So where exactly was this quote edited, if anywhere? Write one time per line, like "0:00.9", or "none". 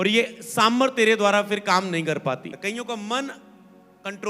0:02.5